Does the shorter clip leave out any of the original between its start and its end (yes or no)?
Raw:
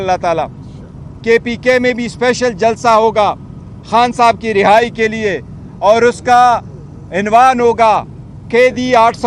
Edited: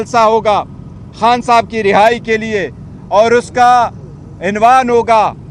no